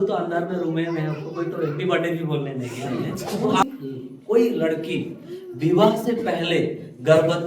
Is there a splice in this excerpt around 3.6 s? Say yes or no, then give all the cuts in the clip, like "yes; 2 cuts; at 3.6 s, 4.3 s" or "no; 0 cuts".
yes; 1 cut; at 3.6 s